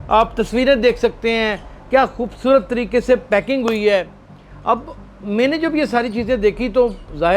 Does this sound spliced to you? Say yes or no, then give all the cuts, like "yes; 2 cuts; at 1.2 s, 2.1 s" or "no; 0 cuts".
no; 0 cuts